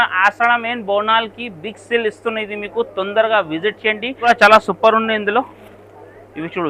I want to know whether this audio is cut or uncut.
cut